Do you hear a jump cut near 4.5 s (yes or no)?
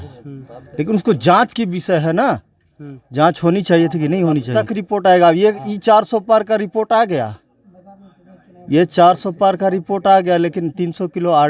yes